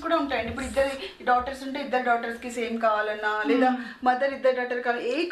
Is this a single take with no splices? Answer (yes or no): yes